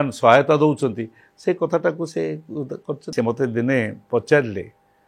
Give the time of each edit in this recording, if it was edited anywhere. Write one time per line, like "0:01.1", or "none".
0:03.1